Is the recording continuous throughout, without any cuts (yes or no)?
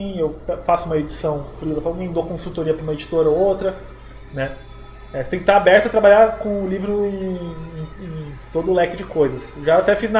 yes